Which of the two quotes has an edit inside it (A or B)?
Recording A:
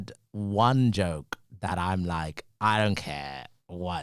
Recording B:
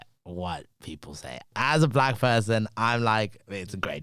B